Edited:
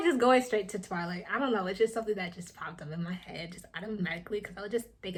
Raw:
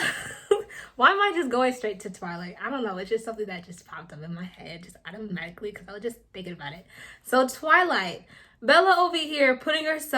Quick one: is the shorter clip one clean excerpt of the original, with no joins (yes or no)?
yes